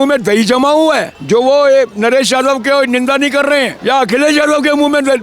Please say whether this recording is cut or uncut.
cut